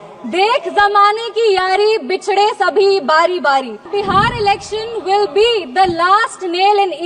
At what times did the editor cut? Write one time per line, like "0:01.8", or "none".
0:03.9